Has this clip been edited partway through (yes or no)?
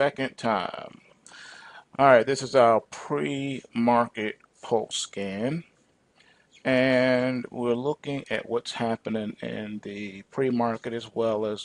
no